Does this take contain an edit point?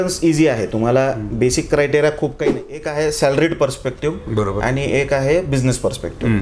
yes; 1 cut; at 2.9 s

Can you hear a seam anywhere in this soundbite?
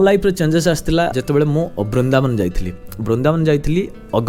no; 0 cuts

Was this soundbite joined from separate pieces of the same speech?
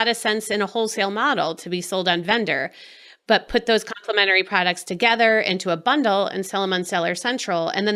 no; 0 cuts

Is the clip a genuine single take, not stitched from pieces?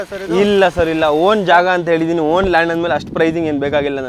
yes; 0 cuts

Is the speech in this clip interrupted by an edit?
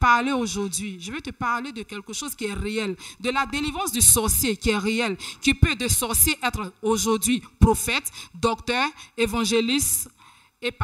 no; 0 cuts

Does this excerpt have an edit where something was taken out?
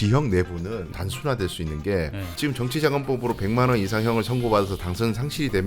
yes; 2 cuts; at 1.0 s, 2.2 s

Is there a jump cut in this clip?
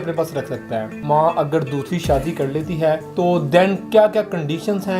yes; 2 cuts; at 0.9 s, 3.1 s

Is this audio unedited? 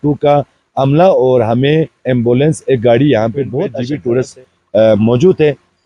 no; 1 cut; at 3.7 s

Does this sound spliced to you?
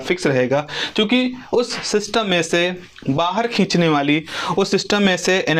no; 0 cuts

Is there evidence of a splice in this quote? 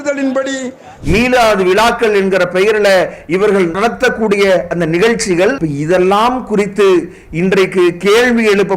yes; 2 cuts; at 0.9 s, 5.6 s

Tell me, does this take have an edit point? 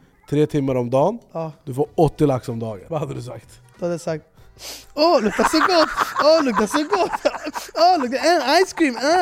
yes; 1 cut; at 2.7 s

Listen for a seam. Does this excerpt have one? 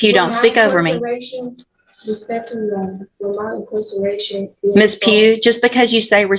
no; 0 cuts

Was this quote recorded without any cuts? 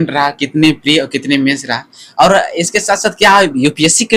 yes; 0 cuts

